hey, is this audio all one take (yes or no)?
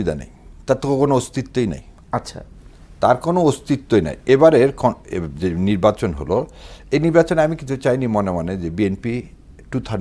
no